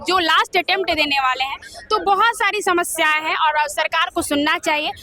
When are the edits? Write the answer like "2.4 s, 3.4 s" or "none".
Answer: none